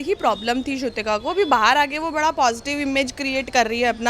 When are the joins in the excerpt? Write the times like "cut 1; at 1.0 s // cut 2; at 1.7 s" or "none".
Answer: none